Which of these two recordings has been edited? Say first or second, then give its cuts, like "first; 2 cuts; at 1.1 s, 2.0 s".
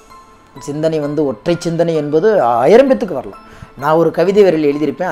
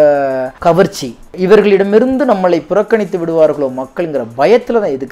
second; 1 cut; at 1.3 s